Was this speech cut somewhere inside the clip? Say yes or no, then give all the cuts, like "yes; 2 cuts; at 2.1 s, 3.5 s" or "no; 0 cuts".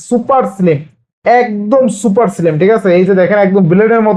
no; 0 cuts